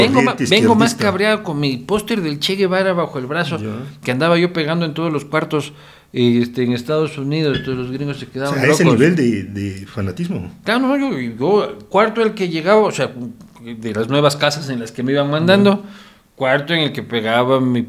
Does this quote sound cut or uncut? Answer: uncut